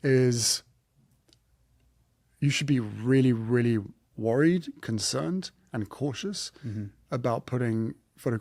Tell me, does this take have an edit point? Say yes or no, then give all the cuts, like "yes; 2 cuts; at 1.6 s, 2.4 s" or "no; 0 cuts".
no; 0 cuts